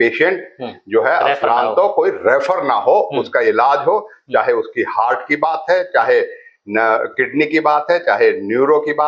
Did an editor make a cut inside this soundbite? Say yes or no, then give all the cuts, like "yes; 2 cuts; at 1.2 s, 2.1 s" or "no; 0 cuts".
no; 0 cuts